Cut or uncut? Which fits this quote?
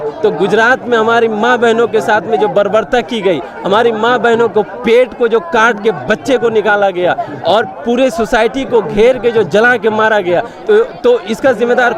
uncut